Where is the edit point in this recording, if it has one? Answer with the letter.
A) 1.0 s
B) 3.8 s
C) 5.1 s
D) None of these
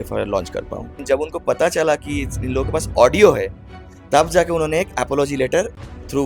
A